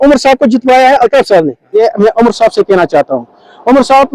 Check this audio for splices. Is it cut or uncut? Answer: cut